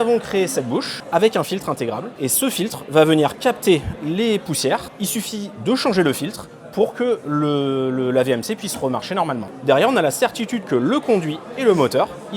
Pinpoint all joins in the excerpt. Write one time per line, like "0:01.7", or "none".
0:01.0
0:02.1
0:04.9
0:09.5